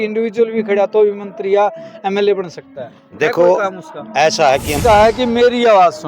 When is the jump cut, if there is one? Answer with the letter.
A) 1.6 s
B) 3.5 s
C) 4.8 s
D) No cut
C